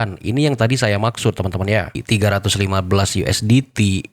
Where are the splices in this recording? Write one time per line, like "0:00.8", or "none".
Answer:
0:02.0